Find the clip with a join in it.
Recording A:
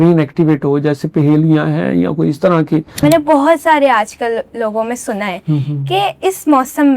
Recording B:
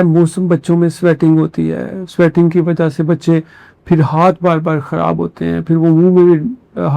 A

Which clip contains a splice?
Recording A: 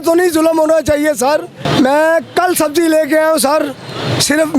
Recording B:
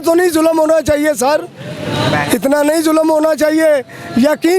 A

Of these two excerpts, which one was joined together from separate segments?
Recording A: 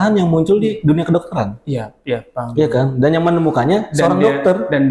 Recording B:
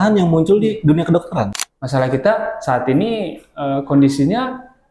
B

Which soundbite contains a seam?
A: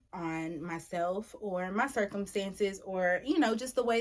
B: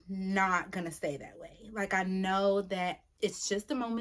B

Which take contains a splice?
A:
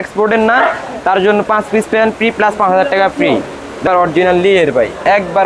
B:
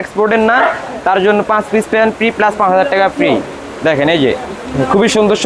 A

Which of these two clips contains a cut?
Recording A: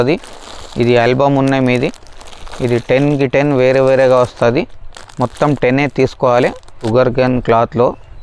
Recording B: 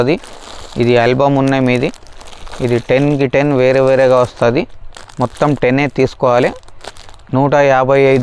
A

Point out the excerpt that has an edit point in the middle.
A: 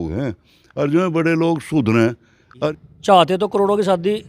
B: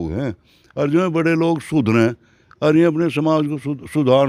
A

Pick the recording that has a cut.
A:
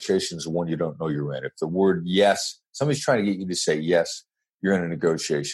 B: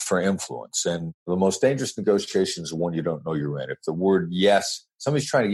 B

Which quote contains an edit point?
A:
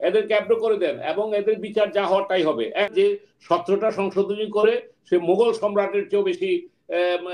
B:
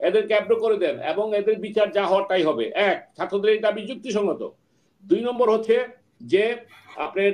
A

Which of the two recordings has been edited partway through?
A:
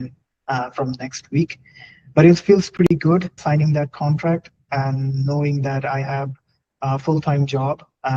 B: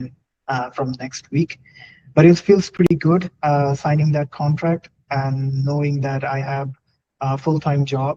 A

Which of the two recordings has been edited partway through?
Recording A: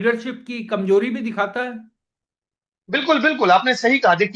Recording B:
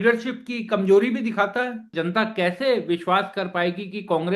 B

